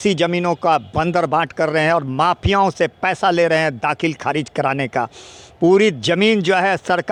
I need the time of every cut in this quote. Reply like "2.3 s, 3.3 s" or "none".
none